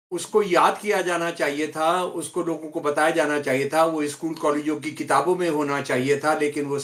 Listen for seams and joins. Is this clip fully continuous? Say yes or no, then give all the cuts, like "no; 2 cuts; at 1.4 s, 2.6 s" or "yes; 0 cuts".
yes; 0 cuts